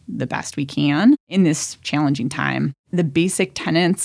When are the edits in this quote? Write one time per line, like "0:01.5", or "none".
0:01.3
0:02.8